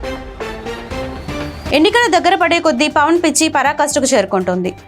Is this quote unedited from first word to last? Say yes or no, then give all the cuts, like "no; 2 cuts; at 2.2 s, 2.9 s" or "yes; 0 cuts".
no; 1 cut; at 1.7 s